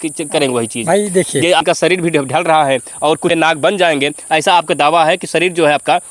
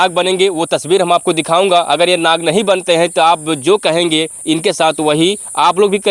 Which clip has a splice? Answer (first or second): first